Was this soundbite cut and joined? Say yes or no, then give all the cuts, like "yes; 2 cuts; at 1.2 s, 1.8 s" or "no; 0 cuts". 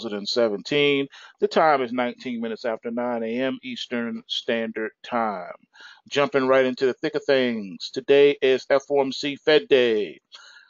yes; 1 cut; at 3.7 s